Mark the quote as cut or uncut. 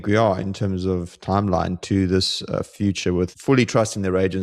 cut